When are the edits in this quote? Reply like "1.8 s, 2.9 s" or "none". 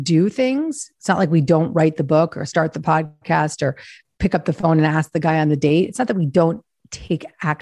none